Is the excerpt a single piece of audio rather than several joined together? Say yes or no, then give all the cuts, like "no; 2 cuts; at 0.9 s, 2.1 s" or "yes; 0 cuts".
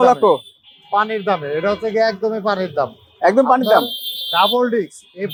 yes; 0 cuts